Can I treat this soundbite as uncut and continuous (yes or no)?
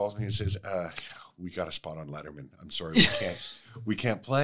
yes